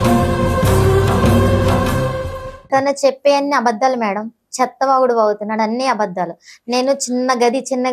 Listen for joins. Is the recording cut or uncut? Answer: cut